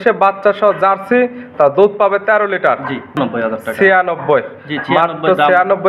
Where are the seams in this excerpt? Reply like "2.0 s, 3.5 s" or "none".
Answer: 3.2 s